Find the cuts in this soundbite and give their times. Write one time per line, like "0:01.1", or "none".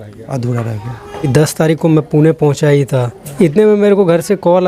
0:01.3
0:03.2